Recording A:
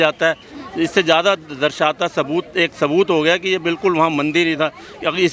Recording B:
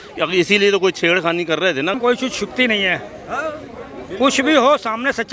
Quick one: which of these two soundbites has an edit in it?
B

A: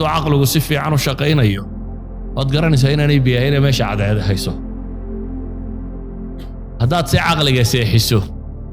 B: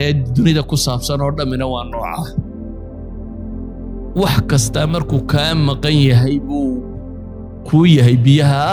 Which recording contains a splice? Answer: A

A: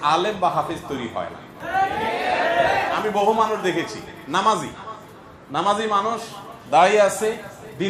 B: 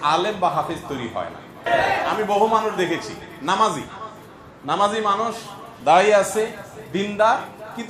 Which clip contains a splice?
B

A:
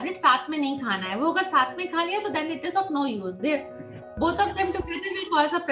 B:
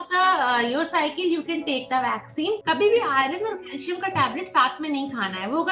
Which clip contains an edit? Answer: B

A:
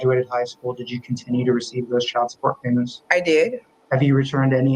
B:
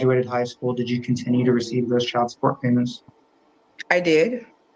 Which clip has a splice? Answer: A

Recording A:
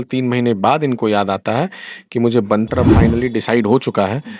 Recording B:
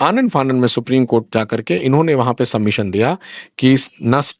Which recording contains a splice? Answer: A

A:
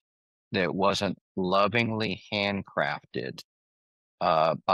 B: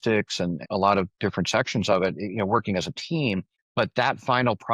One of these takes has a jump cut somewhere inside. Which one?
B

